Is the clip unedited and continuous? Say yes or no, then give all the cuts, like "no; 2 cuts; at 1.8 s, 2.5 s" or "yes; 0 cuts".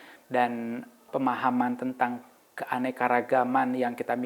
no; 1 cut; at 1.0 s